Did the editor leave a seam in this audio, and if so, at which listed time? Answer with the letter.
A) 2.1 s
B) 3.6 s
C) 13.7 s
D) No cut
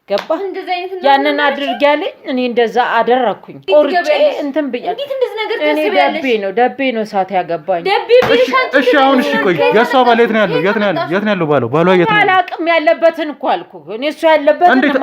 B